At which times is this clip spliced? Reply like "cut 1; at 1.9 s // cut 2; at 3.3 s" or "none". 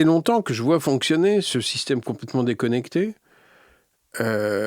none